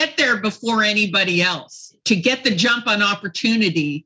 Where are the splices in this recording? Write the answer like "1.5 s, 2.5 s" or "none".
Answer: 2.0 s